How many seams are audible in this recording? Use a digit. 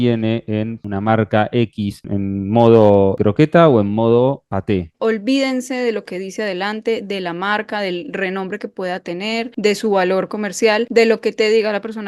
6